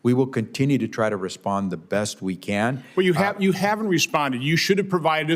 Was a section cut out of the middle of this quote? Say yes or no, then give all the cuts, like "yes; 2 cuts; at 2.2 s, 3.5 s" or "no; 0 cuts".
no; 0 cuts